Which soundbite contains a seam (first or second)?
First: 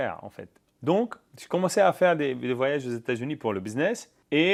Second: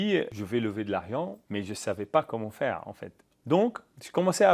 second